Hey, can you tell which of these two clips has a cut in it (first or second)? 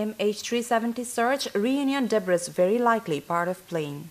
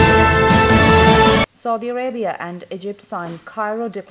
second